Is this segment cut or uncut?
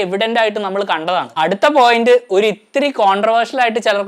cut